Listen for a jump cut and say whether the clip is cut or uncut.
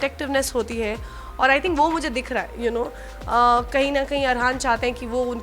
uncut